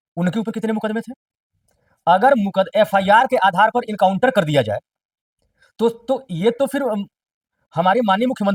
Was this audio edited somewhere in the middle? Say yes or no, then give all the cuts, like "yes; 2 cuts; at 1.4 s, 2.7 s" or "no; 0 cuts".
no; 0 cuts